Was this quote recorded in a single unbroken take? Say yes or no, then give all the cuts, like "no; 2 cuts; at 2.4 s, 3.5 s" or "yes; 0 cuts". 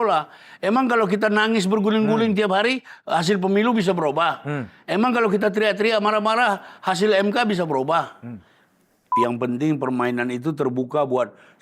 no; 1 cut; at 9.1 s